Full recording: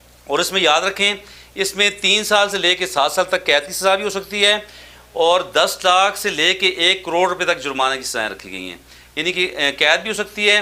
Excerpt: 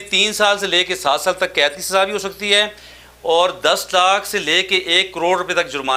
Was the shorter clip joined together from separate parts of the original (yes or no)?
no